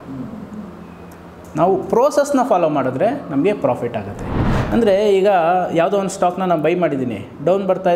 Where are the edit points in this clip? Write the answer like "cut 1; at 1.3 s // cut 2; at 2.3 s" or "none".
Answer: cut 1; at 4.2 s